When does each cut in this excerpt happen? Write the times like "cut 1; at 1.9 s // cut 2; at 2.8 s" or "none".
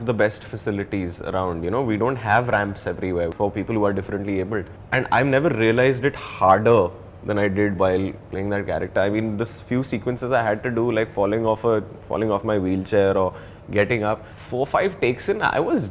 cut 1; at 3.3 s // cut 2; at 4.8 s // cut 3; at 14.3 s